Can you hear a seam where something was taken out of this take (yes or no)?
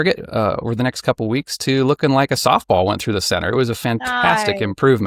no